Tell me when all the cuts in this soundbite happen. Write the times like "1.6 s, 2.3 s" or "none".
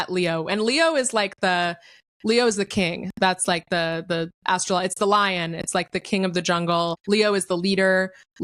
none